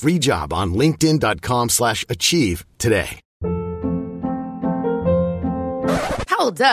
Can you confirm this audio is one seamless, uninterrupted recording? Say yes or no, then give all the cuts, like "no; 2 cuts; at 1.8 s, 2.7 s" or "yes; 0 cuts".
no; 1 cut; at 3.2 s